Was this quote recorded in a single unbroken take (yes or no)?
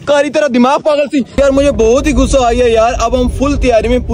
no